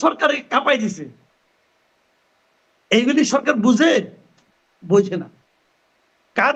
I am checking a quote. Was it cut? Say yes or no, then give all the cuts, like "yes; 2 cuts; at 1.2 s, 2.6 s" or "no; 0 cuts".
no; 0 cuts